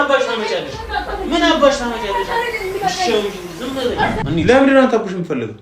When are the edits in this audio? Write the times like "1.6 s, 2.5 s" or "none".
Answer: 4.2 s